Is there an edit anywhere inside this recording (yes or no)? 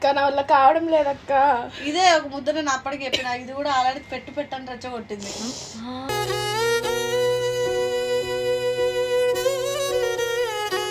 no